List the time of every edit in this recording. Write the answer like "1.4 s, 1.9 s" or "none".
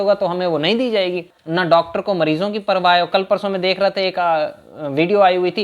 1.3 s